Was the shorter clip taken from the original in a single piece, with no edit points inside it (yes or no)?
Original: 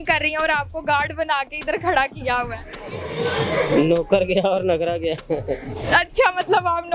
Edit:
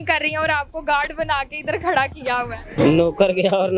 no